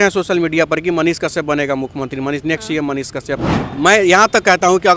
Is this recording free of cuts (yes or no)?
no